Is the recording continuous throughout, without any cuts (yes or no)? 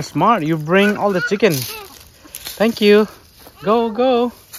yes